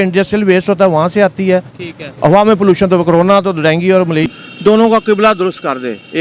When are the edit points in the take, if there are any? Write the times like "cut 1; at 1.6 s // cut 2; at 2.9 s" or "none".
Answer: cut 1; at 4.3 s